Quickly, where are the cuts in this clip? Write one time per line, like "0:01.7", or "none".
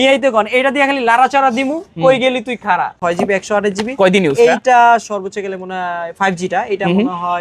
0:03.0